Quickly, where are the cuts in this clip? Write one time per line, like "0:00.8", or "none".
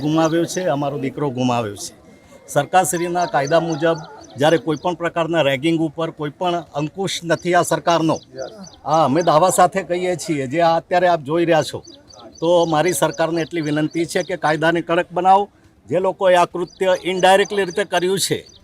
none